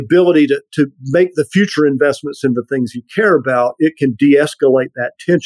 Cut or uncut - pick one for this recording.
uncut